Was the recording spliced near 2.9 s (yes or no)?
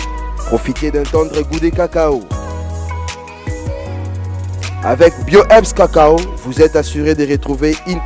no